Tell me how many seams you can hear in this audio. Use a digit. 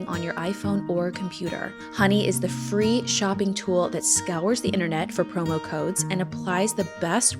1